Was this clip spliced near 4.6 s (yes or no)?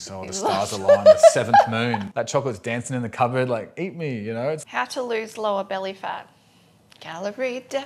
yes